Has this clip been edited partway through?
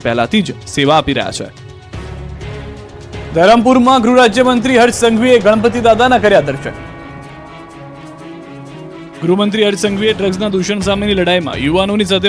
no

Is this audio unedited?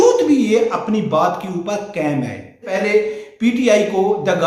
no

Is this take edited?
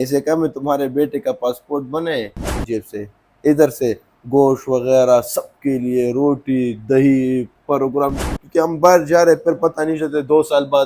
yes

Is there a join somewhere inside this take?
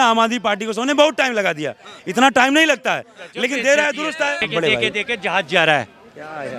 yes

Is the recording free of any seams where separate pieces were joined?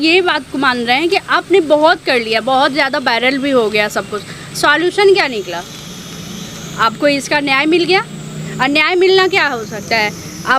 yes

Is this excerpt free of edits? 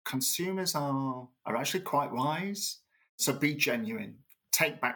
no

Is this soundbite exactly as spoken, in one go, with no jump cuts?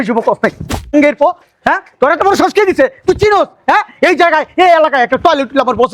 yes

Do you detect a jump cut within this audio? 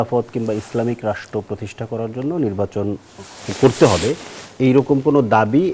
no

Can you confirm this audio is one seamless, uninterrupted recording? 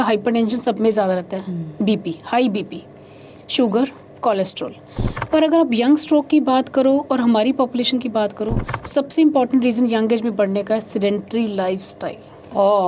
yes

